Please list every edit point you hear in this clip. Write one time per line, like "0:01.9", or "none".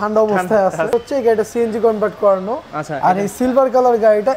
0:00.9